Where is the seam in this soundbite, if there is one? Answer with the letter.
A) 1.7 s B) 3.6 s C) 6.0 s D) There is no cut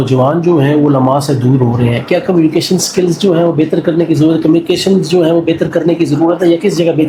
D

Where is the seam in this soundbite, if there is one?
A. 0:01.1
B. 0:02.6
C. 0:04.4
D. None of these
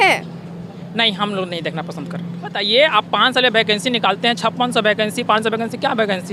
B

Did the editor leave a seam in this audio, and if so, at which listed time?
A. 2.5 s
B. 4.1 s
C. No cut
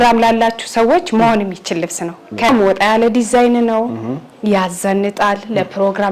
A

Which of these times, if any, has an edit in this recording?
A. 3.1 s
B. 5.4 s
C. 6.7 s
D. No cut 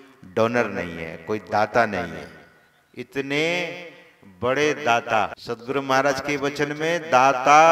B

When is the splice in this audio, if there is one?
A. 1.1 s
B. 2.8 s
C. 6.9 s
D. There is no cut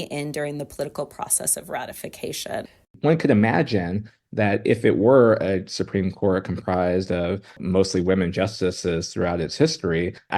B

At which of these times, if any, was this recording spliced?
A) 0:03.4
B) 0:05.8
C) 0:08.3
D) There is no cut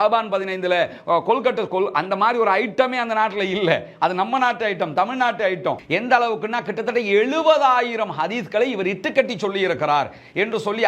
B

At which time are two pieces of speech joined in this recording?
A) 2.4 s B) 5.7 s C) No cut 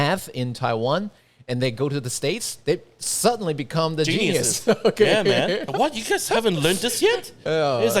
B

